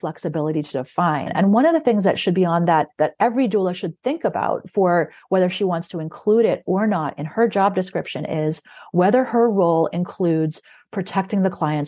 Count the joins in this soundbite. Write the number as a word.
one